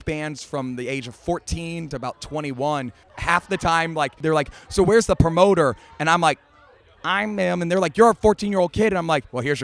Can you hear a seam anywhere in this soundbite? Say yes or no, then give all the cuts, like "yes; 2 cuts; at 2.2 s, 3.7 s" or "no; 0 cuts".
yes; 3 cuts; at 1.9 s, 3.0 s, 4.2 s